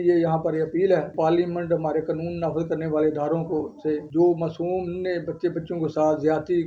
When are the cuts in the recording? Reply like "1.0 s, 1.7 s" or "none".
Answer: 1.1 s, 4.1 s